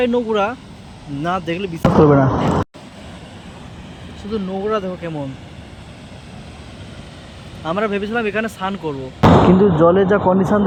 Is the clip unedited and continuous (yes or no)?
yes